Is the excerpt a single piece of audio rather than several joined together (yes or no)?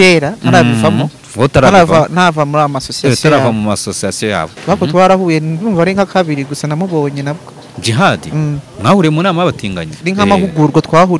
no